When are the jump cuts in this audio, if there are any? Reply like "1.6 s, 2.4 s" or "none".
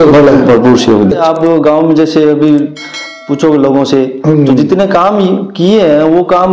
1.1 s